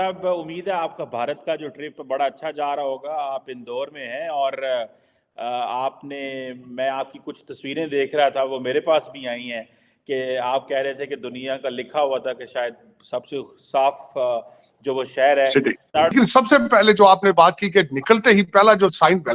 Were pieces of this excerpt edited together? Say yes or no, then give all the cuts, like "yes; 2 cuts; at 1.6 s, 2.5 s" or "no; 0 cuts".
no; 0 cuts